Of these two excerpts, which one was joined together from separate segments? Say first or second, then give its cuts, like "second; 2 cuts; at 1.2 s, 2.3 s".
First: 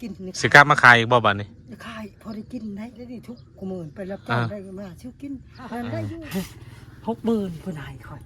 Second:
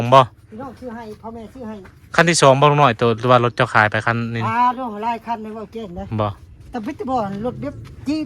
first; 2 cuts; at 3.2 s, 6.2 s